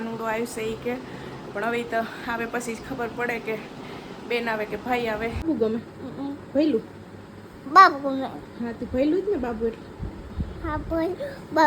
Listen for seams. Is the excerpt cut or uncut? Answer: cut